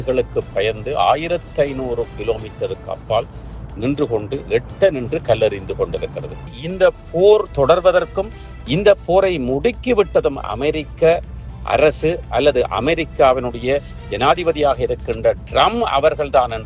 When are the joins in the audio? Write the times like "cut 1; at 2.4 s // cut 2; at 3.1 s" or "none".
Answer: cut 1; at 6.4 s